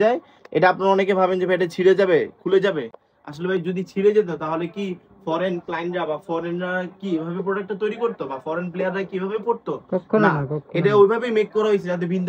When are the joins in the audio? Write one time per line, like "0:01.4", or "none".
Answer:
none